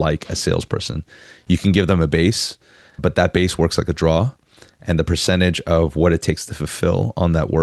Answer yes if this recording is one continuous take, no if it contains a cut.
yes